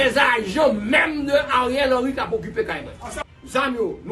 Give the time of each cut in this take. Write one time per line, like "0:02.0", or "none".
0:03.1

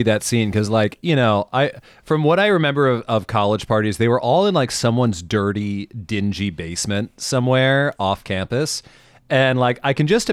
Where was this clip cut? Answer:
none

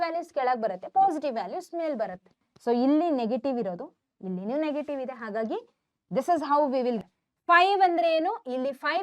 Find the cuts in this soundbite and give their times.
0:02.5
0:07.0

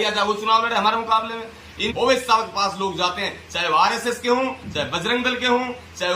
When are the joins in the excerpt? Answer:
0:01.8

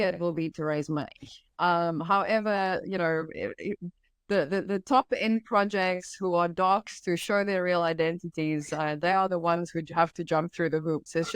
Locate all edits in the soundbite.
none

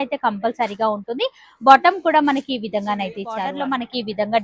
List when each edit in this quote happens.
0:03.5

